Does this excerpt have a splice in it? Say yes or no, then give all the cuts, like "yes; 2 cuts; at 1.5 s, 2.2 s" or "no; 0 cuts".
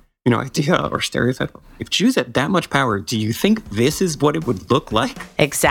no; 0 cuts